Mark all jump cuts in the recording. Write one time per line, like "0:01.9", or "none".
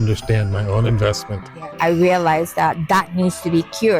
0:01.7